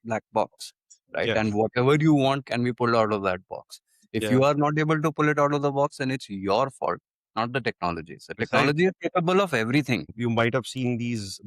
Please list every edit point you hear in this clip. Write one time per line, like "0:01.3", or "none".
0:10.1

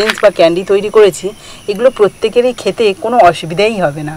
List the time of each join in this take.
none

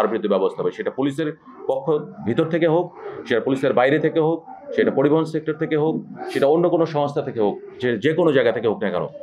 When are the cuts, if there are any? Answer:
none

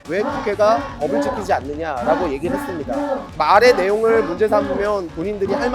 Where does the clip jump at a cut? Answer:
0:03.3

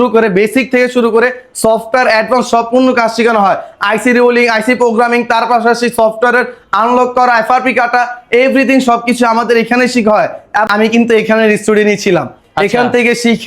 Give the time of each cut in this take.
0:10.7

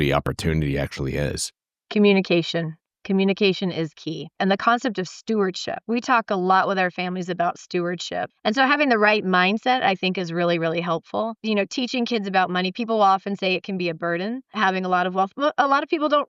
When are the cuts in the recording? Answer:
0:04.3
0:08.3

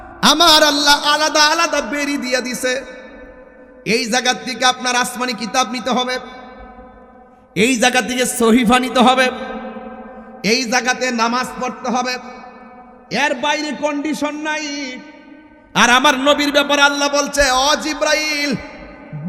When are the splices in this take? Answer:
none

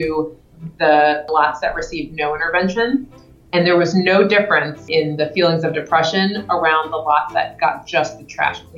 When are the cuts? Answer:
0:01.3
0:04.8

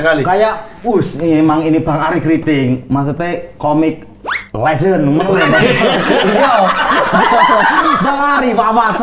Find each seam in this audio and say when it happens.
none

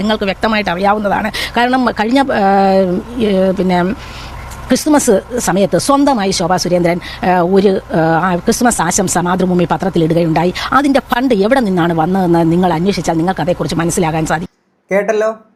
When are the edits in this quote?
none

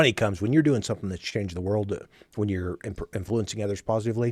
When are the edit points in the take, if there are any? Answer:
none

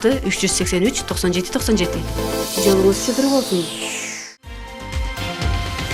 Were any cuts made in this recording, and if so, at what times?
0:04.6

